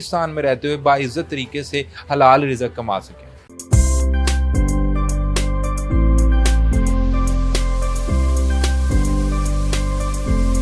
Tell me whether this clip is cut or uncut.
uncut